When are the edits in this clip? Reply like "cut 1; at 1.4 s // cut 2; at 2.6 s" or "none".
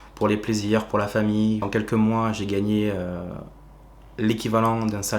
cut 1; at 1.7 s